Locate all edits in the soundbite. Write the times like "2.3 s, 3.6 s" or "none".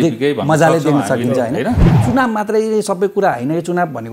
1.9 s